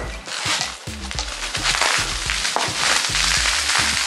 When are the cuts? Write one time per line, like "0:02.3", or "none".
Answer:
none